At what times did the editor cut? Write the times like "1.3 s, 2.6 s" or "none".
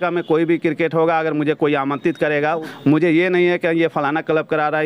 2.6 s